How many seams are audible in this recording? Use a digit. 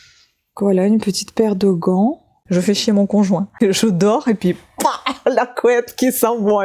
2